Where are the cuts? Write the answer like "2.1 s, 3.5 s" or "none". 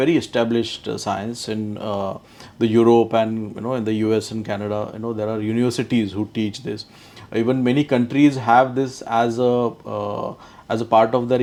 none